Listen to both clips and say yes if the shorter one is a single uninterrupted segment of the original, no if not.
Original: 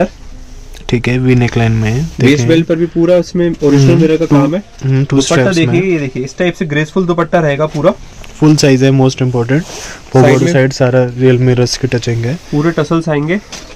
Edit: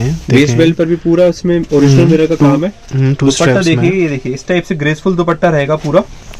yes